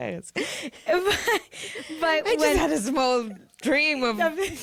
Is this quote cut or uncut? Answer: uncut